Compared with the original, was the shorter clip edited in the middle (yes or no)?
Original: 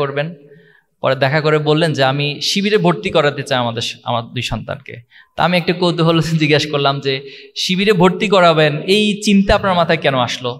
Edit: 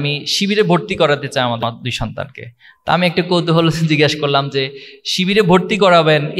yes